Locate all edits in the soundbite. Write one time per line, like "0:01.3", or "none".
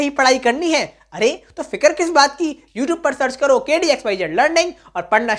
none